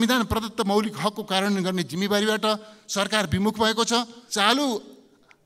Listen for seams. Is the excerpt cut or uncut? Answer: cut